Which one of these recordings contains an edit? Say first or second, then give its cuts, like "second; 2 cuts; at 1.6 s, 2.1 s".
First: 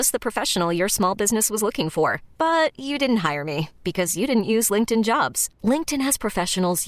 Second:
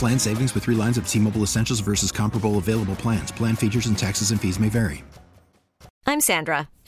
second; 1 cut; at 6.0 s